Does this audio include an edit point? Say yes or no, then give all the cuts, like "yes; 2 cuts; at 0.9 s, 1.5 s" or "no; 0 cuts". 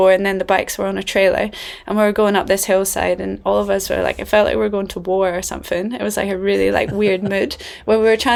no; 0 cuts